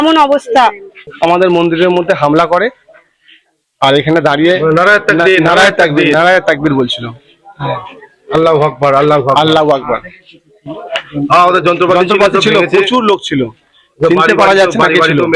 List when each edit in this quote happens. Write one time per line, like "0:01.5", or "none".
0:01.0